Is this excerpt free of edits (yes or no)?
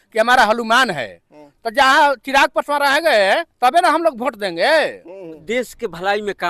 no